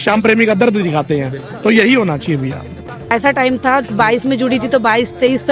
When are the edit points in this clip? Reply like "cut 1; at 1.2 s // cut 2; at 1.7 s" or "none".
cut 1; at 3.1 s